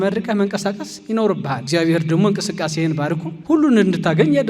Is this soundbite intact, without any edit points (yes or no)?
no